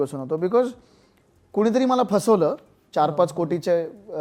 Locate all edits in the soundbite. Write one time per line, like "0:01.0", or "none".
none